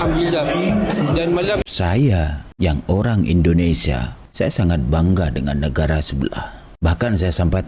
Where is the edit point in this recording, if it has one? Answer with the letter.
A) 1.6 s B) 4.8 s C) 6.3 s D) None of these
A